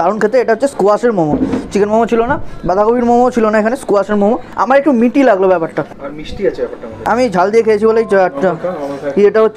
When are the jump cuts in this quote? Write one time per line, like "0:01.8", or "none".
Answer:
none